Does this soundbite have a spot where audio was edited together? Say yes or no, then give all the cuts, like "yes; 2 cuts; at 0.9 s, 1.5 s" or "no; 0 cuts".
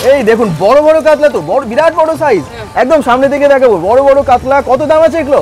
no; 0 cuts